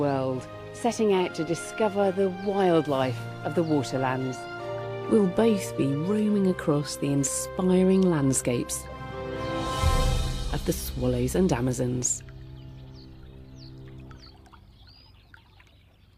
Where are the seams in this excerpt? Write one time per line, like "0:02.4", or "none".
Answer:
none